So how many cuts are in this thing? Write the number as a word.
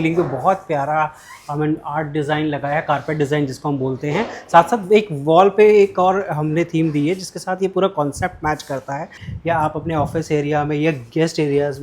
one